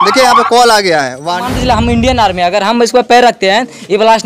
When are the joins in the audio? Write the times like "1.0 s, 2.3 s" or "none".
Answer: 1.5 s